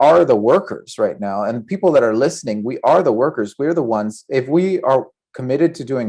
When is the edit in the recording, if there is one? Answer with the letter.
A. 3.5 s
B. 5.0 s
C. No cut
C